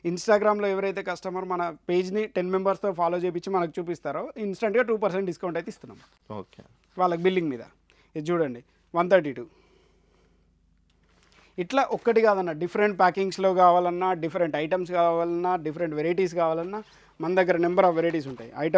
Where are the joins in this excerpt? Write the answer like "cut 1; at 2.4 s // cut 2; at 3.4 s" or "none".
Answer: none